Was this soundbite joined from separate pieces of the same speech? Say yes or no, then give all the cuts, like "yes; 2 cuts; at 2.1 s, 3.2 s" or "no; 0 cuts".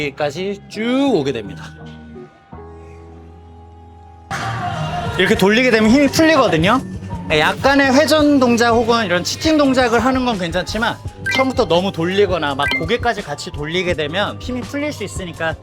yes; 1 cut; at 4.3 s